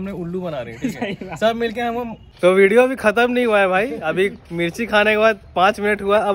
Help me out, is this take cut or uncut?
cut